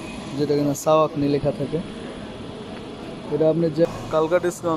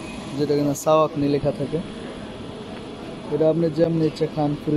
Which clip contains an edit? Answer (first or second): first